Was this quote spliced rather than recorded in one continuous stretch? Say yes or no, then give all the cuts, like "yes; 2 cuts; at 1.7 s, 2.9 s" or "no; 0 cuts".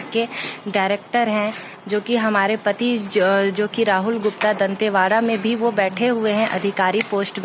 no; 0 cuts